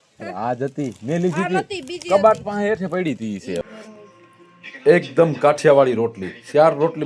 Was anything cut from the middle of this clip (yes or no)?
yes